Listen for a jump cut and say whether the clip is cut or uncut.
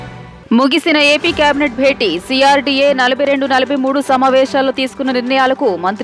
uncut